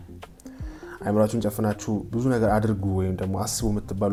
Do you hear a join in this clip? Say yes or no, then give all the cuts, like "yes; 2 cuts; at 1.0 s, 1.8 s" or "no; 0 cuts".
no; 0 cuts